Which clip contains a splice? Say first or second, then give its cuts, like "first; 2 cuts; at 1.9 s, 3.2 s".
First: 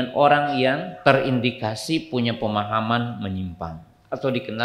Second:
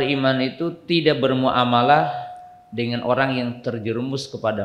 first; 1 cut; at 0.9 s